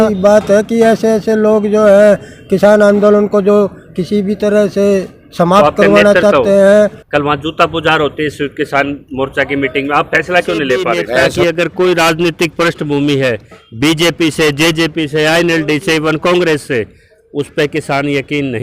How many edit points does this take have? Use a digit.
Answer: 2